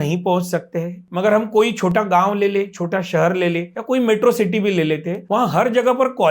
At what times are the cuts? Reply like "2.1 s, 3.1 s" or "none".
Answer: 1.0 s, 3.7 s, 5.1 s